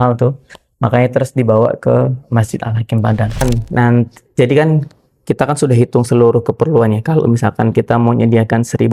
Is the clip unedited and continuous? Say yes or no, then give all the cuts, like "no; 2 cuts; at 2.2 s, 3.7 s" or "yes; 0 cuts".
no; 1 cut; at 3.4 s